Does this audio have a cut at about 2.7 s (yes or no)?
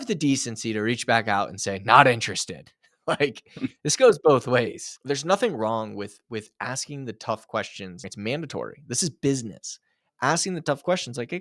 no